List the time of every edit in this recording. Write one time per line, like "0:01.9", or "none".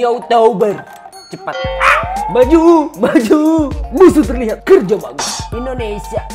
0:05.2

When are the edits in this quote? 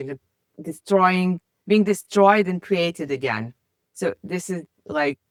none

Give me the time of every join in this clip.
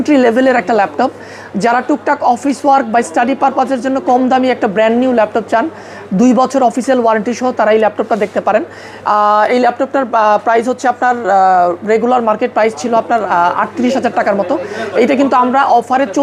none

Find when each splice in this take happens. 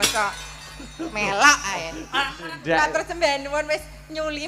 0:02.4

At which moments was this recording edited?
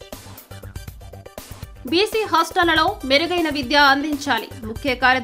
0:01.3

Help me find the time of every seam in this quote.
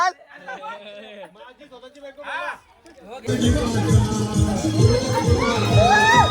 0:03.3

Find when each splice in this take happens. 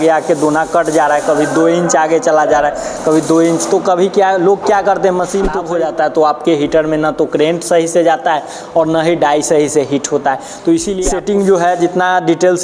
0:05.6
0:10.9

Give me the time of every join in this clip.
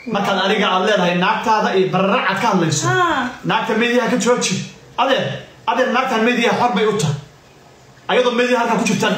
none

